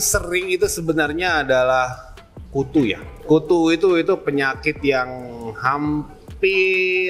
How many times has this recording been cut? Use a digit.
1